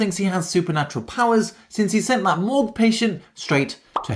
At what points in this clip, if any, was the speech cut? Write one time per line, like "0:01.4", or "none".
none